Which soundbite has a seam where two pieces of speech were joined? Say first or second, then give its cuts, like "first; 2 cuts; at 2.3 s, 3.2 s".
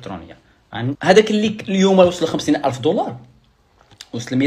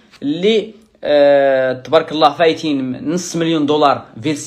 first; 1 cut; at 1.0 s